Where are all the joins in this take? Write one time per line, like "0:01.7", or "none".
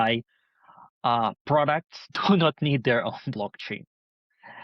0:02.1